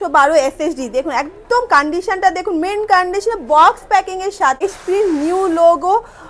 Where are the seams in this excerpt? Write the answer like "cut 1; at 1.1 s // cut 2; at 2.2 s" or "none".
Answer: cut 1; at 4.6 s